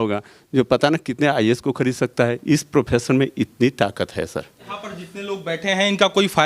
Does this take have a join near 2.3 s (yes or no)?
no